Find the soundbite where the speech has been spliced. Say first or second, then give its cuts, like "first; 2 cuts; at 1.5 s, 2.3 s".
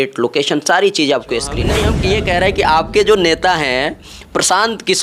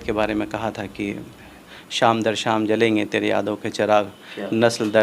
first; 1 cut; at 1.9 s